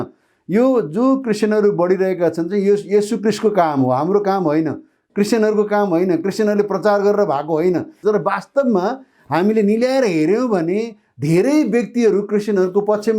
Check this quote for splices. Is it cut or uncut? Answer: cut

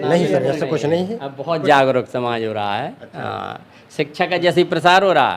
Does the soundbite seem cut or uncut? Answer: uncut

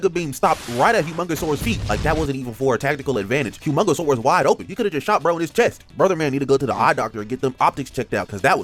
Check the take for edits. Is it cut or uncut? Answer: uncut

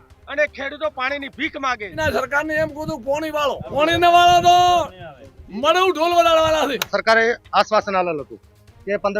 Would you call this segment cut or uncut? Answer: cut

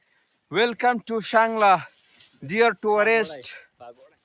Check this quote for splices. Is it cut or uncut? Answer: uncut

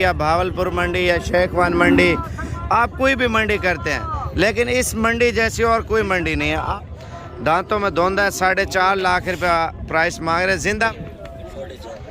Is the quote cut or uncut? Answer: cut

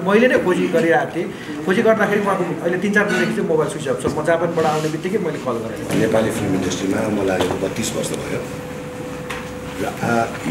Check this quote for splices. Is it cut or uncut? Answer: cut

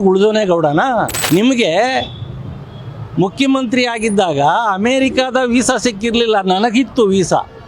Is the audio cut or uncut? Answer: cut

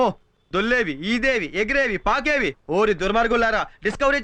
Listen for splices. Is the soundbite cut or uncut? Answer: uncut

